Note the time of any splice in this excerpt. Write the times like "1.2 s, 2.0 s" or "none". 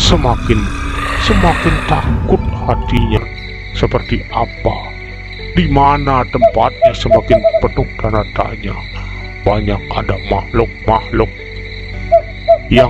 3.2 s